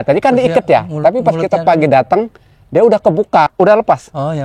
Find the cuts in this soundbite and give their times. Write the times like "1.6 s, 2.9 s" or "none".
3.5 s